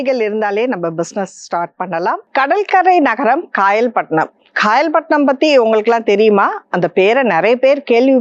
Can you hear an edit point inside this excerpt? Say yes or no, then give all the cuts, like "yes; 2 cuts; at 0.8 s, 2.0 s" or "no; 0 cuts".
yes; 1 cut; at 2.2 s